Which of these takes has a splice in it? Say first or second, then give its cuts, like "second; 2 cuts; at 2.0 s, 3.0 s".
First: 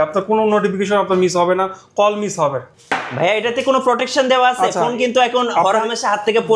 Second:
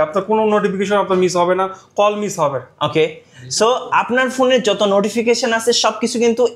first; 1 cut; at 2.7 s